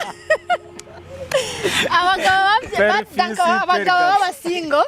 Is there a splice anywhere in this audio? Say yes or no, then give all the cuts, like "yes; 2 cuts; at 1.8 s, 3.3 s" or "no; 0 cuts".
no; 0 cuts